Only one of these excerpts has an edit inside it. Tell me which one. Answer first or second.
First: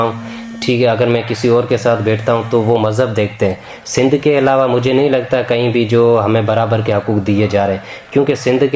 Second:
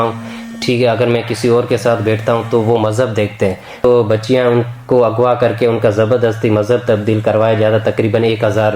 second